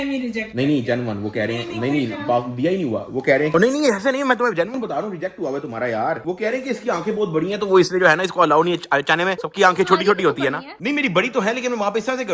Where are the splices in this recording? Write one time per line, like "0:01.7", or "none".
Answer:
none